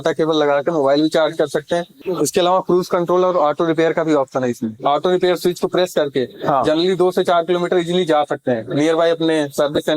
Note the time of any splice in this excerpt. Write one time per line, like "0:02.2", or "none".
0:02.0
0:04.8